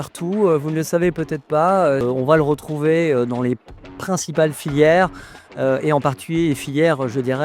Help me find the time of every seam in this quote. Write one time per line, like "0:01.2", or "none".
0:02.0